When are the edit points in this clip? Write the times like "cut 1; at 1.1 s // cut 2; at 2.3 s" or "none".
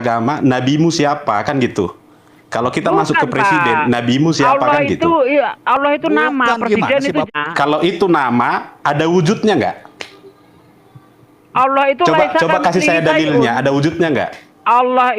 cut 1; at 7.3 s